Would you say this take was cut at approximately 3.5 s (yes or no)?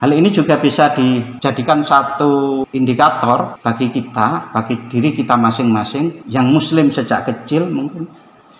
yes